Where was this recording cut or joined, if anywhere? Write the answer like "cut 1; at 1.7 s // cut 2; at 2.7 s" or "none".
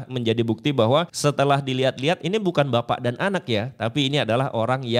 cut 1; at 1.1 s